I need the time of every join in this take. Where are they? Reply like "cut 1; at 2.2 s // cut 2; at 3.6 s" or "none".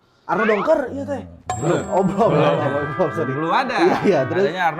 none